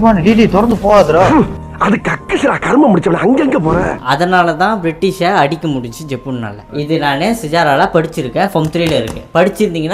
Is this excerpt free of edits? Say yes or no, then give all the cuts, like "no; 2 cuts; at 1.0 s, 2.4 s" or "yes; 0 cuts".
no; 2 cuts; at 1.3 s, 4.0 s